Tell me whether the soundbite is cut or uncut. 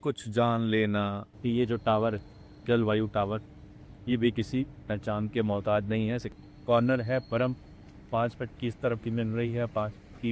cut